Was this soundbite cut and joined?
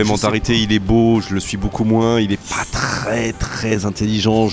no; 0 cuts

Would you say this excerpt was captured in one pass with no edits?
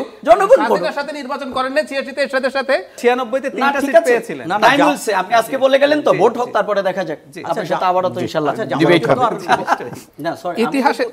no; 2 cuts; at 3.0 s, 10.1 s

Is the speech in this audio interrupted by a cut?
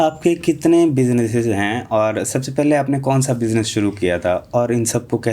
no; 0 cuts

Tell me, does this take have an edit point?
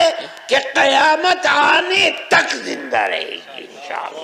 no; 0 cuts

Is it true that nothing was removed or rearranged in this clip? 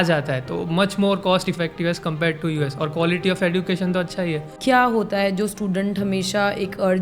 no; 1 cut; at 4.5 s

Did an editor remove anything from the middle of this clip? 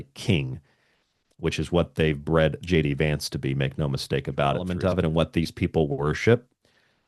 yes; 1 cut; at 4.7 s

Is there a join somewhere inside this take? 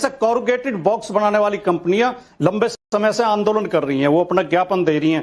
no; 0 cuts

